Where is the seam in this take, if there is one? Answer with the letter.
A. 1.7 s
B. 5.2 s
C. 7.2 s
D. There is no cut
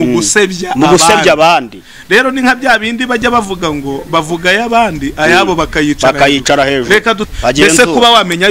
C